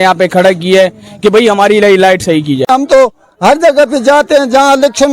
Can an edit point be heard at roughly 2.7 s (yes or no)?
yes